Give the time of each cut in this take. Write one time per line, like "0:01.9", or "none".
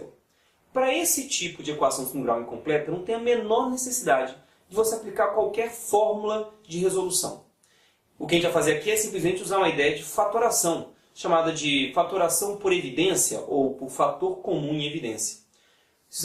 0:14.8